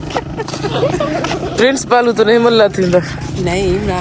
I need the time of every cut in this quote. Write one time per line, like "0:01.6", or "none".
none